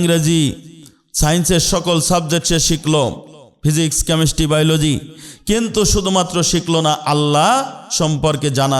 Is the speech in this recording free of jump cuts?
yes; 0 cuts

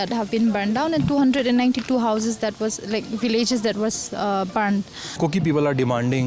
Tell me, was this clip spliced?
yes; 1 cut; at 5.1 s

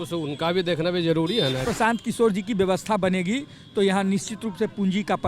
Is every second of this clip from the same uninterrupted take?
no; 1 cut; at 1.6 s

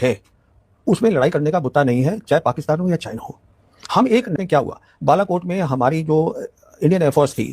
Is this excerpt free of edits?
no; 1 cut; at 4.3 s

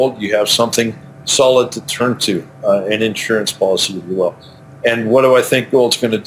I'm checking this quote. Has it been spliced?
no; 0 cuts

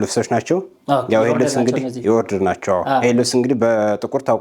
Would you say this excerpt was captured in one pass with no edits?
yes; 0 cuts

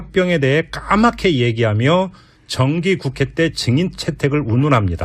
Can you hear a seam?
yes; 1 cut; at 1.7 s

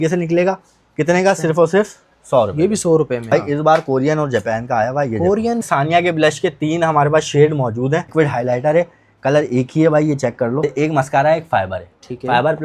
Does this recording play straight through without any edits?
no; 4 cuts; at 3.3 s, 5.6 s, 8.1 s, 10.6 s

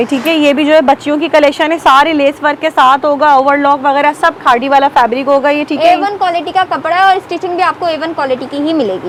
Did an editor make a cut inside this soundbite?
no; 0 cuts

